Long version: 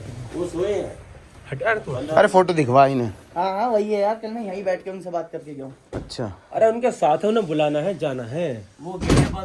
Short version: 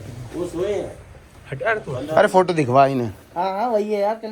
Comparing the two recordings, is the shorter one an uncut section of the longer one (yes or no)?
yes